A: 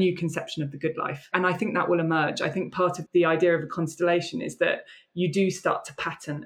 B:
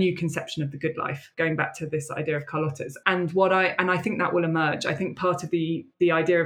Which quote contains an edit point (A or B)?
A